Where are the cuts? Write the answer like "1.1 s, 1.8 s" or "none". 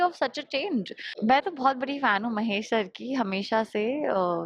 1.0 s